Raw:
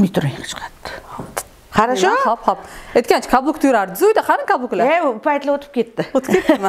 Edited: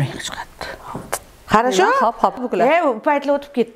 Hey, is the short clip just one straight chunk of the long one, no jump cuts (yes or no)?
no